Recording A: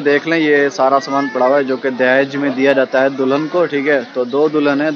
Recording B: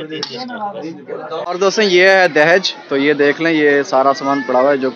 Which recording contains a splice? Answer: B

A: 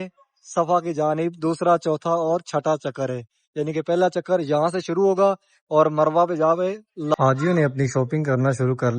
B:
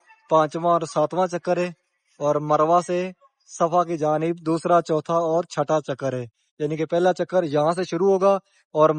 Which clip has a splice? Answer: A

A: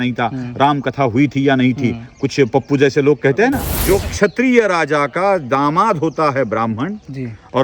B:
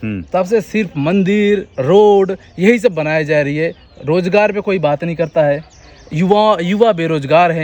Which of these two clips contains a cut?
A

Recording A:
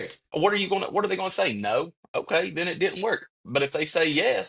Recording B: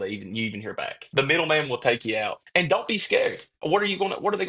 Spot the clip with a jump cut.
B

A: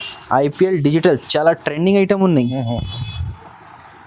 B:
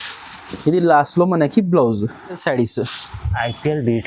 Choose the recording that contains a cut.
B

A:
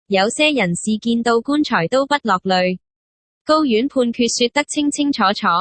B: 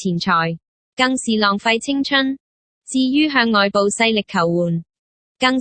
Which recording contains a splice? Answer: A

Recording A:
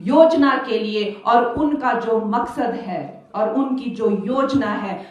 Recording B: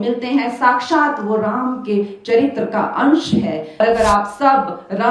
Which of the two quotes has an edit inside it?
B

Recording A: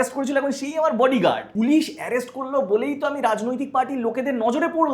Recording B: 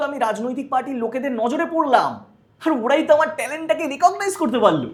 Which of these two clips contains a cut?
A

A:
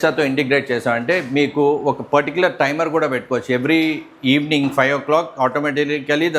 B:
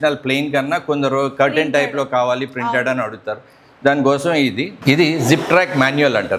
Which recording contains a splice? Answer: B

